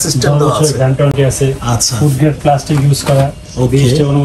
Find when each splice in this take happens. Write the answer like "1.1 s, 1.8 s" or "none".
none